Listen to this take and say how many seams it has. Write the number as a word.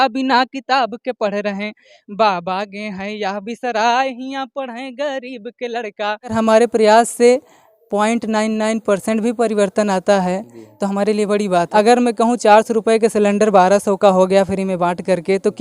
two